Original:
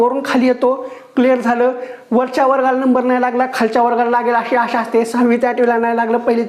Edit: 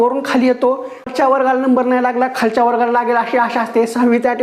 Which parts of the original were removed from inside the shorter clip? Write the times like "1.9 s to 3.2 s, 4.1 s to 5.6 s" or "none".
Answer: 1.1 s to 2.3 s